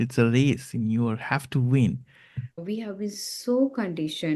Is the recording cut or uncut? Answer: cut